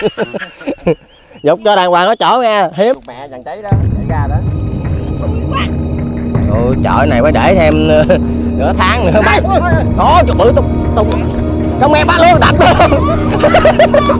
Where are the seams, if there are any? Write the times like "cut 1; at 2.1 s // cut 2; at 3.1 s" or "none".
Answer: cut 1; at 3.0 s